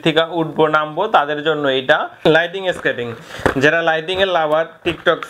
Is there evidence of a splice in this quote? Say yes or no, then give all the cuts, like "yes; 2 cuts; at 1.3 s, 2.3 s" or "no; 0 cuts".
yes; 1 cut; at 2.1 s